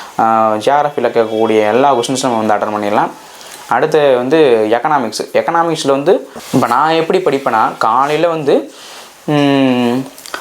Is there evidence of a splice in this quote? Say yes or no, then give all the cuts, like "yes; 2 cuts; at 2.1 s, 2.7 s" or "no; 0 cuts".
yes; 1 cut; at 6.4 s